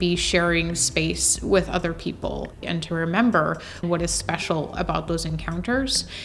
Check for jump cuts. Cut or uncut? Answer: cut